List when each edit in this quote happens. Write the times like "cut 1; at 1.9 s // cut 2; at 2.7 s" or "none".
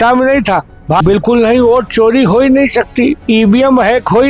cut 1; at 1.0 s